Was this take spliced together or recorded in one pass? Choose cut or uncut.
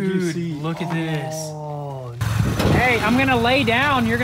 cut